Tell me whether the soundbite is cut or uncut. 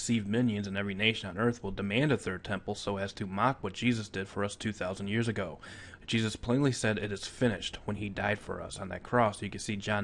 cut